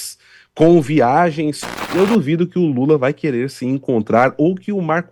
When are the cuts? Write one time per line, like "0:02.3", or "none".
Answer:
0:01.8